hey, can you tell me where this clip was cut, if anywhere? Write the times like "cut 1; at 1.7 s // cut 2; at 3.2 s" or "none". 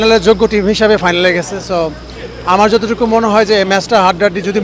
none